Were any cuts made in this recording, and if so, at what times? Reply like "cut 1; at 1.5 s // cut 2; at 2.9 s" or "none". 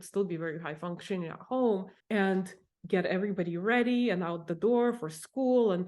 cut 1; at 2.4 s